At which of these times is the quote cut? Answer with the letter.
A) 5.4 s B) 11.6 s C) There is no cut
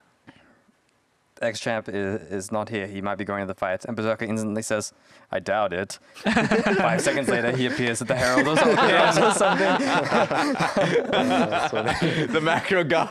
C